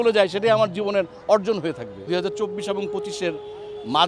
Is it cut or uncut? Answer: cut